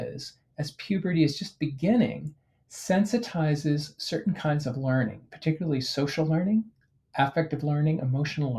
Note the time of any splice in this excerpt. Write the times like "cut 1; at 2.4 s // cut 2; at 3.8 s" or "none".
none

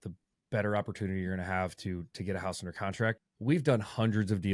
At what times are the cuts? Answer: cut 1; at 3.2 s

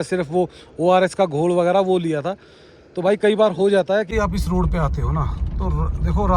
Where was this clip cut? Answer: cut 1; at 4.1 s

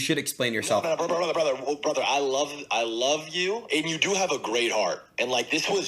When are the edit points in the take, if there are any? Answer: cut 1; at 3.6 s

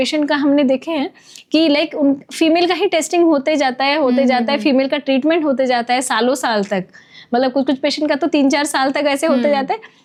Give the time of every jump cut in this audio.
none

